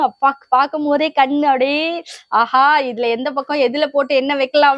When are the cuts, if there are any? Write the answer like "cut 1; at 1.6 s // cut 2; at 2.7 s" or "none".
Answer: none

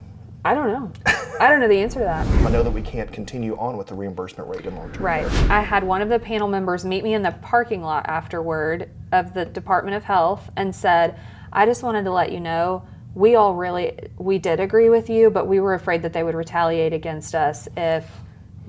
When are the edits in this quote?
cut 1; at 2.4 s // cut 2; at 5.4 s

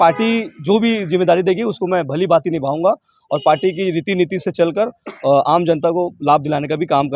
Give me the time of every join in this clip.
none

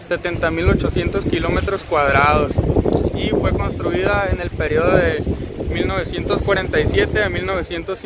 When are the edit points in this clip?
none

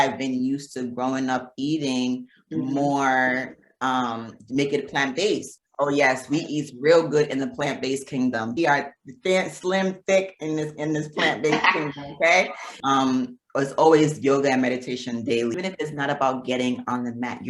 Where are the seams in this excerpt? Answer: cut 1; at 5.5 s // cut 2; at 8.6 s // cut 3; at 12.8 s // cut 4; at 15.5 s

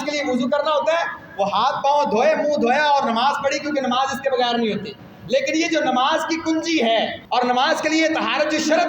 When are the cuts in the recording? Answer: cut 1; at 7.2 s

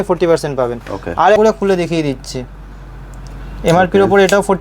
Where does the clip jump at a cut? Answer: cut 1; at 1.4 s

